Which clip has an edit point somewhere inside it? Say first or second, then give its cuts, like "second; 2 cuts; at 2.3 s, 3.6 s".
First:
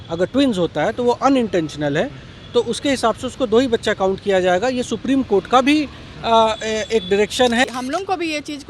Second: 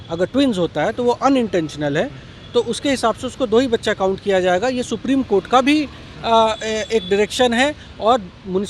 first; 1 cut; at 7.6 s